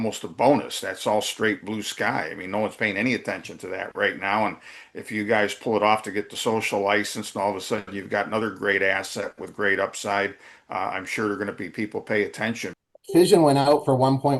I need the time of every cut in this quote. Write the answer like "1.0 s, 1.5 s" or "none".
12.7 s